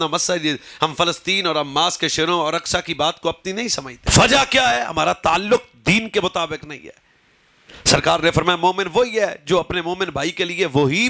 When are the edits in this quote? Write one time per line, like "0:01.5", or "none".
none